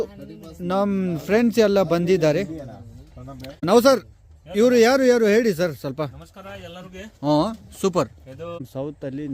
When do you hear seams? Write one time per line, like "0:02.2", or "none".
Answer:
0:03.6
0:08.6